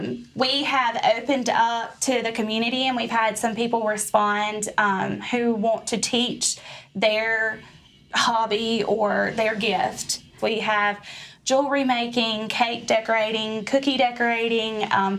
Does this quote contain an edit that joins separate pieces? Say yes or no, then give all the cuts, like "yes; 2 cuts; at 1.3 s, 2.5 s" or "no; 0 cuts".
yes; 1 cut; at 10.3 s